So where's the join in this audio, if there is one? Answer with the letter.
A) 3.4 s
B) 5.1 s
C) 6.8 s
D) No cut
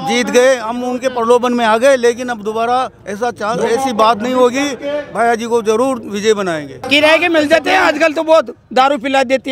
C